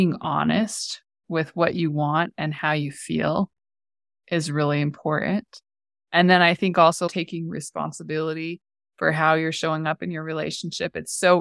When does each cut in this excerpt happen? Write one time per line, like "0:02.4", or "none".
0:07.1